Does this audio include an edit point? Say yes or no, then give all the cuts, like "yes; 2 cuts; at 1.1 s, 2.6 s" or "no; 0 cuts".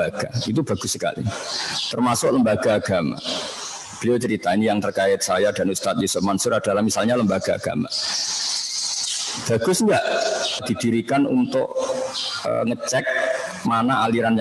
yes; 1 cut; at 10.6 s